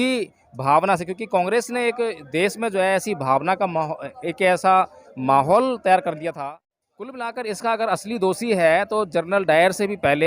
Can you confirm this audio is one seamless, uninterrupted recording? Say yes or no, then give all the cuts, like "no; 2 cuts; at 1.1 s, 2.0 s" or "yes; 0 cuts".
no; 1 cut; at 6.4 s